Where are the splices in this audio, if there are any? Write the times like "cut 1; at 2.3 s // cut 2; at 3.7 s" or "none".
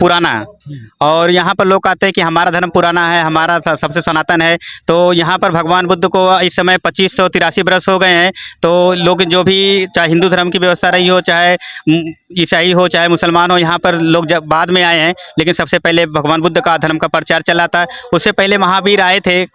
none